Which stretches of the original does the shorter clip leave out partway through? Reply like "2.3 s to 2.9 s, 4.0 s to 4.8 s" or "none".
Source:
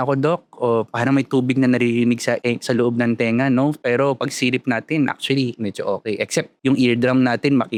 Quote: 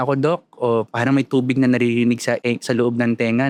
none